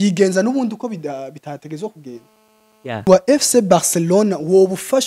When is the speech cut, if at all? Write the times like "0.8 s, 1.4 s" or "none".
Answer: 3.1 s

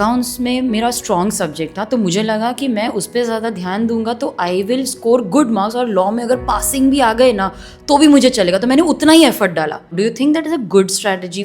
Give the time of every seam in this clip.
9.9 s

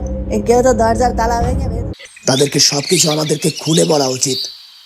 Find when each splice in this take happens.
1.9 s

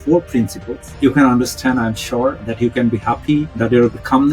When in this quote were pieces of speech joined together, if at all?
2.4 s

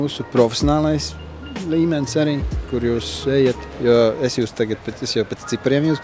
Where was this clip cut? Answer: none

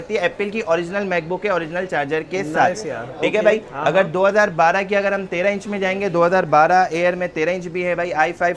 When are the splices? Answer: none

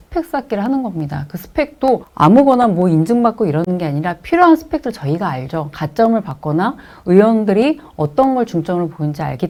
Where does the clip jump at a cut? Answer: none

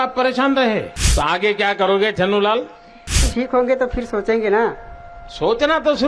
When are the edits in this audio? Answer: 1.0 s, 3.2 s

